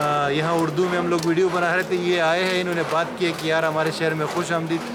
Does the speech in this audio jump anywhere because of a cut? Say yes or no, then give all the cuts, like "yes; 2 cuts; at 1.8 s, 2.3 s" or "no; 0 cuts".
no; 0 cuts